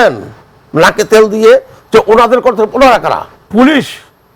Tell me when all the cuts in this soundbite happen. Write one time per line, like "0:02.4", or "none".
0:03.3